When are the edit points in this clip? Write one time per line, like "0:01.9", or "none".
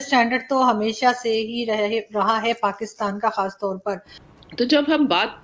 0:04.2